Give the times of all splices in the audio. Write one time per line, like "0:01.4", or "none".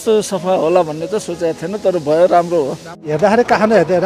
0:03.0